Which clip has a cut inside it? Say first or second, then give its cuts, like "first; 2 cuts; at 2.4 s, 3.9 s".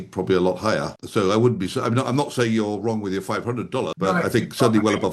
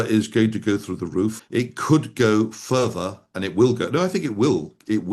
first; 2 cuts; at 1.0 s, 3.9 s